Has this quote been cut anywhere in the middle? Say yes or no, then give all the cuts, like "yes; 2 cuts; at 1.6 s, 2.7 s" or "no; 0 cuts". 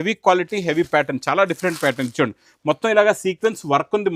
no; 0 cuts